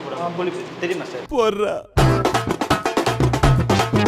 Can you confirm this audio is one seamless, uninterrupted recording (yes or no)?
no